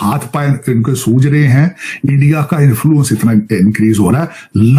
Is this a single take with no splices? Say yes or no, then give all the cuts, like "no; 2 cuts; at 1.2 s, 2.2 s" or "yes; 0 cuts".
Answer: yes; 0 cuts